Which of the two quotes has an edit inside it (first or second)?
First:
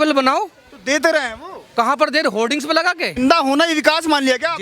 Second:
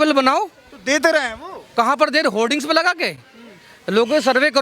first